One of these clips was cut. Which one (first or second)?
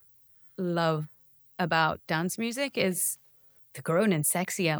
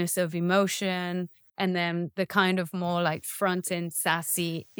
second